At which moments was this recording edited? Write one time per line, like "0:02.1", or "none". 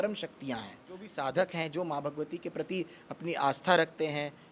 0:01.1